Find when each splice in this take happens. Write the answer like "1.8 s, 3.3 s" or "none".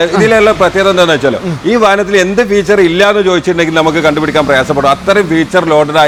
none